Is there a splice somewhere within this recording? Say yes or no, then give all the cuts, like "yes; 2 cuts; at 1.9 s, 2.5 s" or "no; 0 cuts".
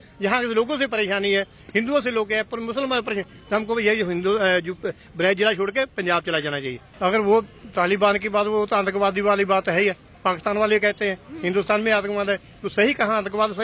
yes; 1 cut; at 6.8 s